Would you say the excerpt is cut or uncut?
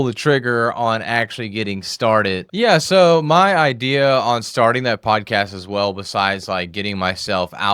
cut